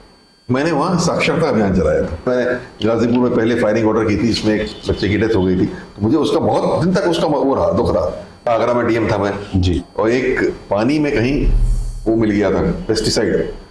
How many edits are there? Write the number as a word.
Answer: two